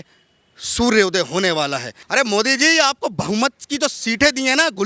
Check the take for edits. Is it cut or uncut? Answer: cut